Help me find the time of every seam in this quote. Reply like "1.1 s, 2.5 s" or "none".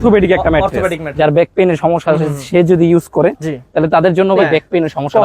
1.0 s, 4.4 s